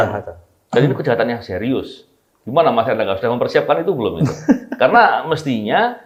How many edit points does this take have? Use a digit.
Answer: 0